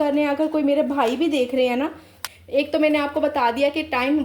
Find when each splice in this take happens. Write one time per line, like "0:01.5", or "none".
0:02.1